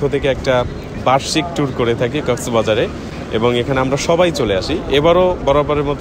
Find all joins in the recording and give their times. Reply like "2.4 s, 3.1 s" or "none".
none